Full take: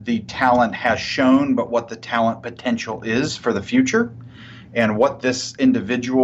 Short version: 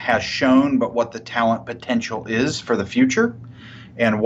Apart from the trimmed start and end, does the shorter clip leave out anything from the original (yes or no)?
no